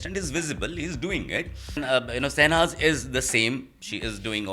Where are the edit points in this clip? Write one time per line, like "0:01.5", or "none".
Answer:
0:01.8